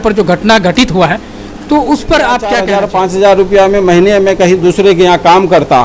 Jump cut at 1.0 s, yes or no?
no